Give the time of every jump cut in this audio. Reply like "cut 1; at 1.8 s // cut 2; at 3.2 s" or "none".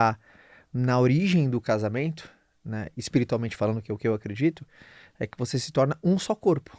none